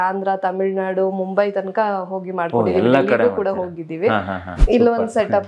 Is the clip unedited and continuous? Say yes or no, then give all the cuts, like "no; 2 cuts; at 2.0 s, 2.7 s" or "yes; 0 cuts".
no; 1 cut; at 4.5 s